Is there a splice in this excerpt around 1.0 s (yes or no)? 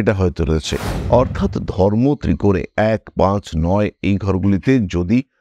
yes